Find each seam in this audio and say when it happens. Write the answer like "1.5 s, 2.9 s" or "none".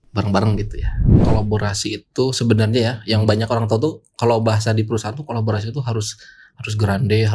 1.1 s